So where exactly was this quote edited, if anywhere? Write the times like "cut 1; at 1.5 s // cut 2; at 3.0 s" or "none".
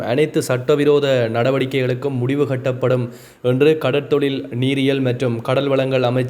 none